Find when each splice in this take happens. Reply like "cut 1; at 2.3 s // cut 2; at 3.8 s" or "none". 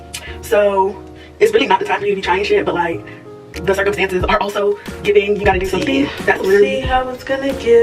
cut 1; at 6.8 s